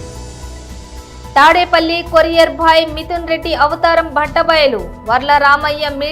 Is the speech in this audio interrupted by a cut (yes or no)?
yes